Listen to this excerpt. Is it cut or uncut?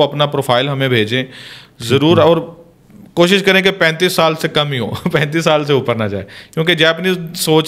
uncut